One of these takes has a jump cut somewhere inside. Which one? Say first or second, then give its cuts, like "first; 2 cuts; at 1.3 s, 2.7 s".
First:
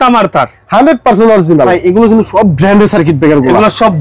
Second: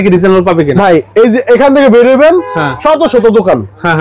first; 1 cut; at 1.7 s